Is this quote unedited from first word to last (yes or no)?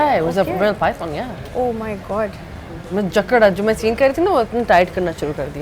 yes